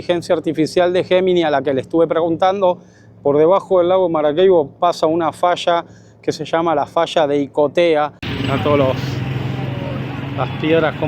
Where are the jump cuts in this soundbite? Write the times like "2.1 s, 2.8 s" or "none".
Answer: 8.3 s